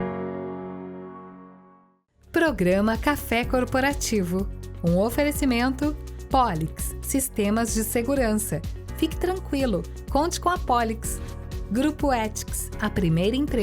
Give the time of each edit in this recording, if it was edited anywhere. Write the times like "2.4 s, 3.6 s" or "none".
2.0 s